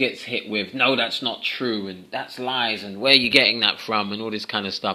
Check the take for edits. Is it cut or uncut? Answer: uncut